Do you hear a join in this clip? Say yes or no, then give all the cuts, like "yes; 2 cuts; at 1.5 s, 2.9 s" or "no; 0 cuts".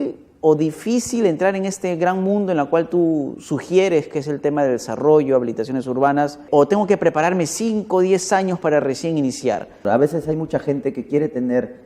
yes; 2 cuts; at 6.4 s, 9.9 s